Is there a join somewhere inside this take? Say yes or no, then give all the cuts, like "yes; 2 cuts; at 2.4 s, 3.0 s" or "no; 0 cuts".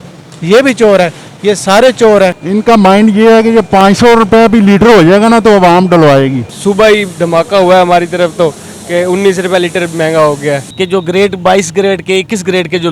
yes; 3 cuts; at 2.4 s, 6.5 s, 10.7 s